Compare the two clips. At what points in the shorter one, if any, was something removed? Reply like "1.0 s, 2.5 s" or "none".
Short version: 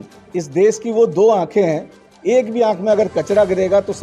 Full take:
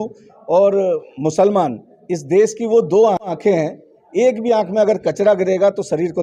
1.4 s